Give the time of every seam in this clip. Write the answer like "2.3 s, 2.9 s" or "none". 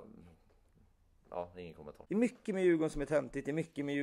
1.9 s